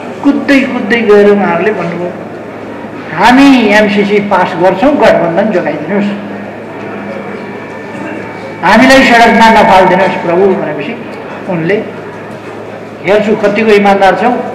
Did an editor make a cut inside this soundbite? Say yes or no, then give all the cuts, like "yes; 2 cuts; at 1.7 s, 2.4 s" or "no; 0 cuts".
no; 0 cuts